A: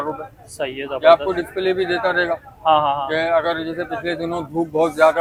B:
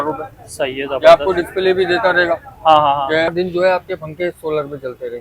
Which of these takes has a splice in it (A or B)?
B